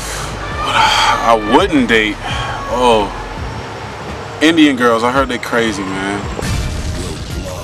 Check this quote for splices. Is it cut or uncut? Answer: cut